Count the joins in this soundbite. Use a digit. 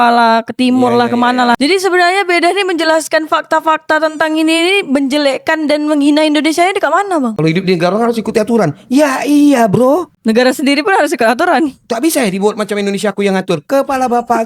2